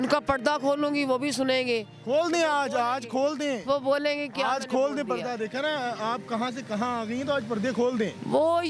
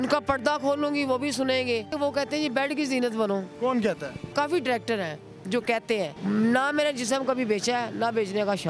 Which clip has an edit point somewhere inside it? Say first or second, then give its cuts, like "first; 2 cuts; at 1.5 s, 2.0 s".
second; 3 cuts; at 1.9 s, 4.3 s, 6.1 s